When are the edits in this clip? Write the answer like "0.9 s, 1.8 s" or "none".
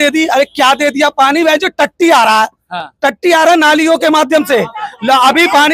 none